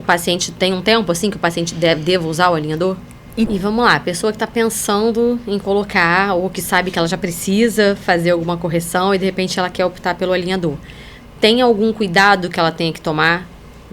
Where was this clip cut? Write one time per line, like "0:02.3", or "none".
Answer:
0:03.5